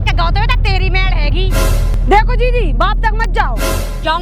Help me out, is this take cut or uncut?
cut